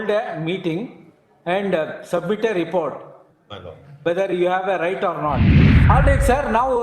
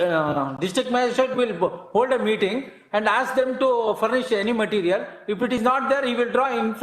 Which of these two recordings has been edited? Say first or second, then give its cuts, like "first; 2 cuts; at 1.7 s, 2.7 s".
first; 1 cut; at 5.7 s